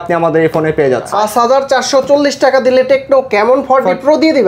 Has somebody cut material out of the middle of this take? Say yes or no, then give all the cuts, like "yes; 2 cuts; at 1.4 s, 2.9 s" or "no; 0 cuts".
yes; 1 cut; at 1.1 s